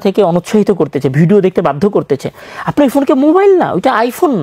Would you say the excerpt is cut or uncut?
uncut